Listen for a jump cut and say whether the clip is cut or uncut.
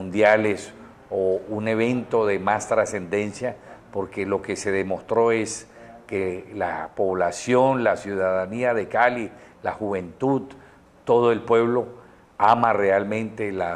cut